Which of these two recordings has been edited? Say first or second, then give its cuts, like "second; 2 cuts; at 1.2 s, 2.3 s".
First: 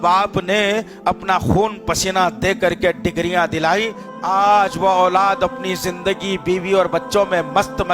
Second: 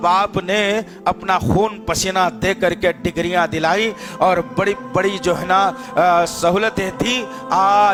first; 1 cut; at 4.0 s